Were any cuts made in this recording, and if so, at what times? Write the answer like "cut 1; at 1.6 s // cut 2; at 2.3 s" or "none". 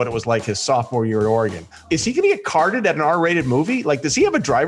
cut 1; at 1.8 s